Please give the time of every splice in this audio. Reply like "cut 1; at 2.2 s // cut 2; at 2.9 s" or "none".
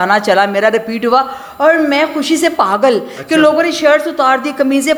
none